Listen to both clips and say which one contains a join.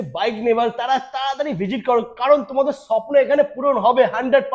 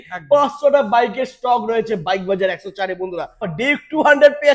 second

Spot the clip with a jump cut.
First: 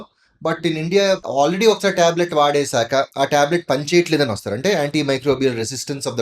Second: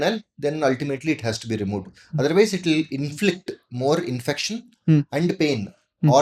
first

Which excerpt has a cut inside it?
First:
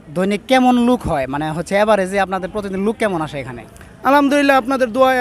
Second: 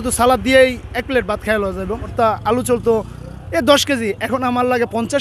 second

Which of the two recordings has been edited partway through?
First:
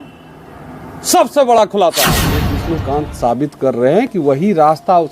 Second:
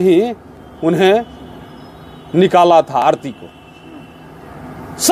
first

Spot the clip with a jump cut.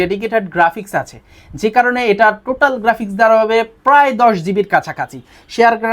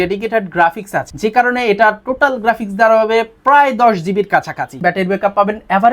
second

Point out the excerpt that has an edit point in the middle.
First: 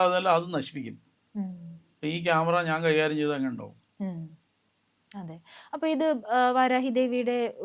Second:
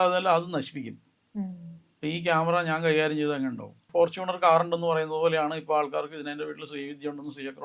second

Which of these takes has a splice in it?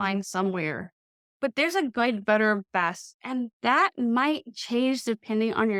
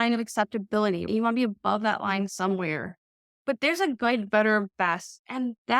second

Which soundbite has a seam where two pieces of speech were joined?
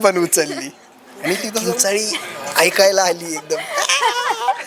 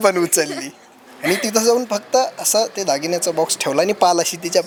first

